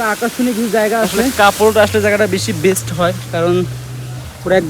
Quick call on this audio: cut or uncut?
cut